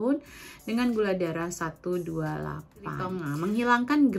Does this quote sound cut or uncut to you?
cut